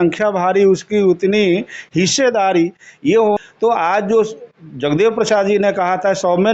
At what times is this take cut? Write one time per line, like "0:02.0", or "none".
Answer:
0:03.4